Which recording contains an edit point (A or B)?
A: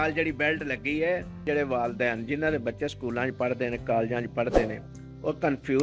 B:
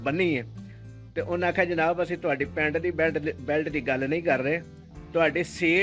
A